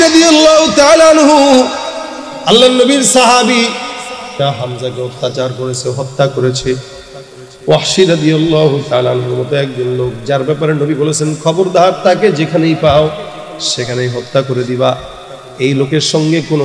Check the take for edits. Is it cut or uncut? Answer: cut